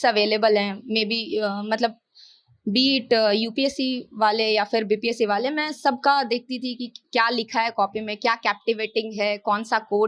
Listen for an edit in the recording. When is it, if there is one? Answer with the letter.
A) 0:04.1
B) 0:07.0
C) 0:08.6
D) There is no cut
D